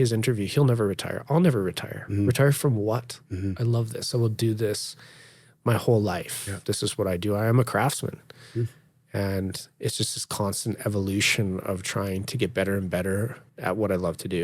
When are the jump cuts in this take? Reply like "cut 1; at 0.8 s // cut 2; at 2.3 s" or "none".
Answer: cut 1; at 6.5 s // cut 2; at 13.4 s